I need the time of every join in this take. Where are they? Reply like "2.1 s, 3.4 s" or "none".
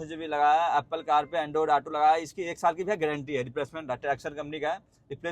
none